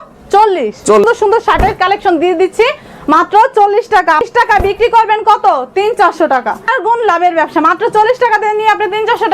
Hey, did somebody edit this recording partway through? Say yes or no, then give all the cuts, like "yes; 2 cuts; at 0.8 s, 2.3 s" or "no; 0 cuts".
yes; 3 cuts; at 1.0 s, 4.2 s, 6.7 s